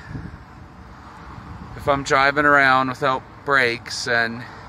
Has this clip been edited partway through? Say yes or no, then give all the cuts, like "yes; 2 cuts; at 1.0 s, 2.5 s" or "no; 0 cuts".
no; 0 cuts